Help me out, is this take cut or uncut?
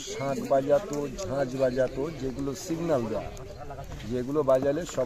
uncut